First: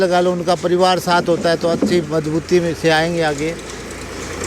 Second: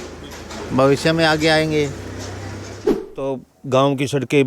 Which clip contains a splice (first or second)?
second